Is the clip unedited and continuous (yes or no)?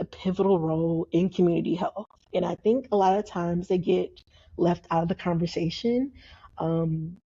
yes